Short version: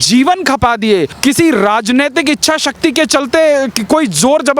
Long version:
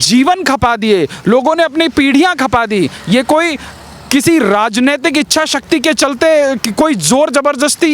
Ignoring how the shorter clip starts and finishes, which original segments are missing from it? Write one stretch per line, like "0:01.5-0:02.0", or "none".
0:01.1-0:04.0

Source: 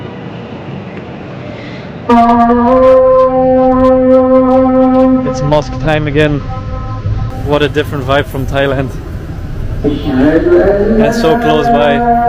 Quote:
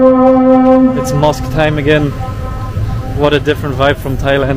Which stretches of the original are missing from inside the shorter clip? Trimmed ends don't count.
none

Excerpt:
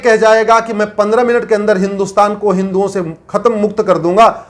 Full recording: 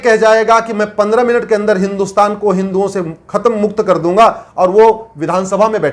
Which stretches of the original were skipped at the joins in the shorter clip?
none

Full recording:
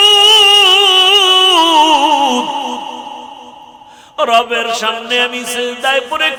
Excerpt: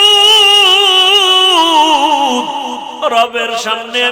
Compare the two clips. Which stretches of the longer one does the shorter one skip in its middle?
0:02.9-0:04.1

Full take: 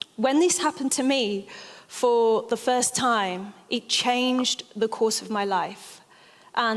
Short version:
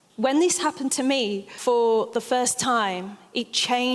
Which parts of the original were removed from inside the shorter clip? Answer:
0:01.5-0:01.8

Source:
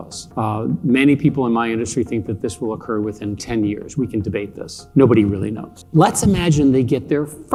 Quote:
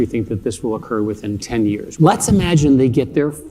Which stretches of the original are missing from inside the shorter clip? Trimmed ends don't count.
0:03.8-0:05.8

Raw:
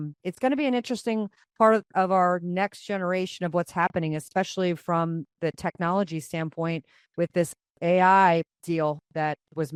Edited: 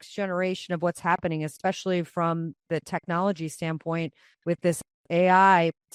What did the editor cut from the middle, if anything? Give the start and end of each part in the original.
none

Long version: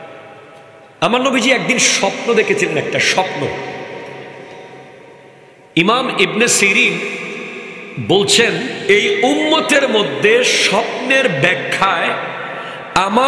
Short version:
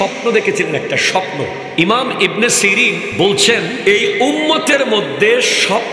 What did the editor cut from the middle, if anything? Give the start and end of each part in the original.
0:03.7-0:05.6
0:07.1-0:08.0
0:08.7-0:08.8

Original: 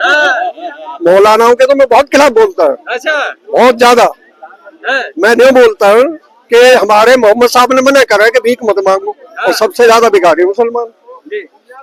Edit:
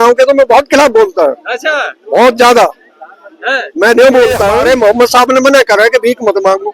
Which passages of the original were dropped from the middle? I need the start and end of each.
0:06.0-0:07.0

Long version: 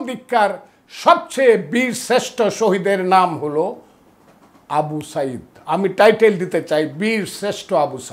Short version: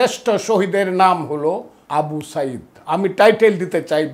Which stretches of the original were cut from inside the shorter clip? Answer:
0:03.9-0:04.5

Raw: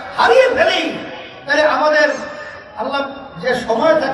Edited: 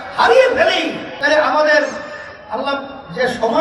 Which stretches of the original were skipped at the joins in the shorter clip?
0:01.1-0:01.3

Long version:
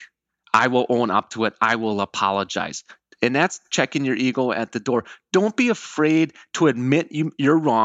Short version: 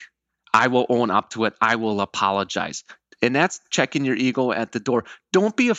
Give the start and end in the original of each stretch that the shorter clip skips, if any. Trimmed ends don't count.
none

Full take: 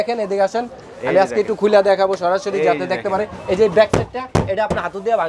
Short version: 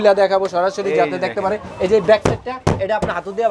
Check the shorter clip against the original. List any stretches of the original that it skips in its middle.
none

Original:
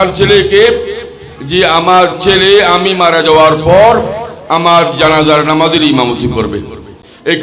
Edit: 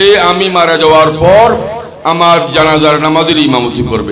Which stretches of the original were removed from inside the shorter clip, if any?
none

